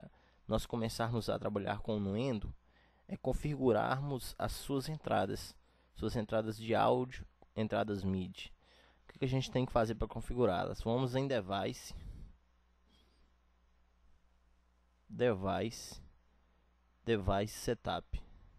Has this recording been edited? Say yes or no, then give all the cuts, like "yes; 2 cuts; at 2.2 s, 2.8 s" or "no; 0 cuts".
no; 0 cuts